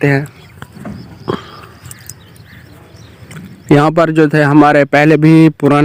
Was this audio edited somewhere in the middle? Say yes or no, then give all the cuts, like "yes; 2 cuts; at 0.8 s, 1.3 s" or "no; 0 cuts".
no; 0 cuts